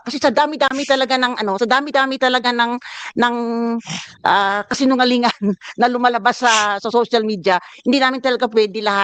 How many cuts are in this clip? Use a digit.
0